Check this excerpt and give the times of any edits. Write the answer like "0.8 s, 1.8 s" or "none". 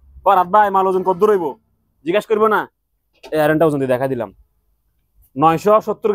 none